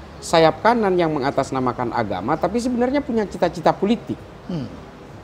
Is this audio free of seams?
yes; 0 cuts

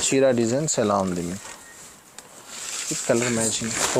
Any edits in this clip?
no; 0 cuts

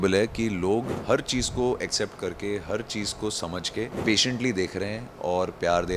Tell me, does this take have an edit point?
yes; 2 cuts; at 0.9 s, 3.9 s

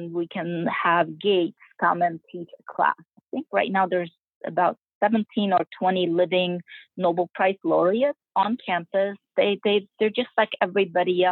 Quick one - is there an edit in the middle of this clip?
yes; 3 cuts; at 3.1 s, 8.2 s, 9.3 s

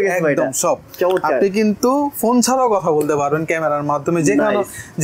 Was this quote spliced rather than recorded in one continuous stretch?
no; 0 cuts

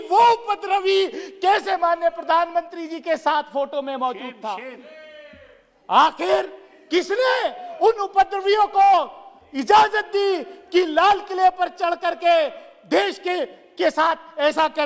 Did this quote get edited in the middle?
no; 0 cuts

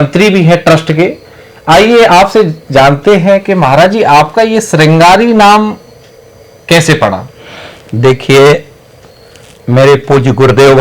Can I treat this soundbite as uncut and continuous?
yes; 0 cuts

